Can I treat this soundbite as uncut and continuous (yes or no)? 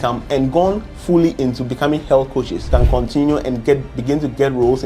no